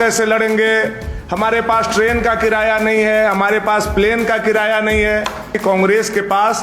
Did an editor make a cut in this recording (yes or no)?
yes